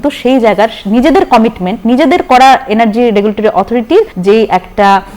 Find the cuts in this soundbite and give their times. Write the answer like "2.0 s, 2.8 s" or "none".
4.1 s